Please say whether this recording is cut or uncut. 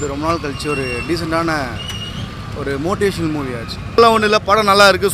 uncut